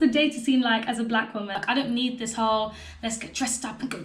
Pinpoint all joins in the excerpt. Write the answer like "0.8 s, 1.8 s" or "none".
1.6 s